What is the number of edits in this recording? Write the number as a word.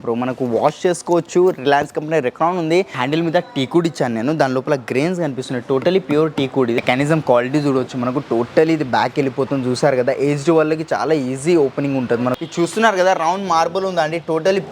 three